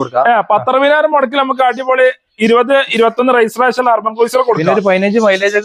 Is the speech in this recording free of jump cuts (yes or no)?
yes